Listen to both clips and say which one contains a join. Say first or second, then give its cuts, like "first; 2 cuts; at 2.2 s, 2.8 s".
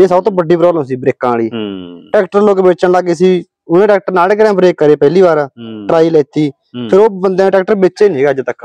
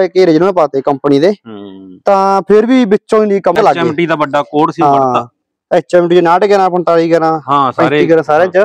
second; 1 cut; at 3.5 s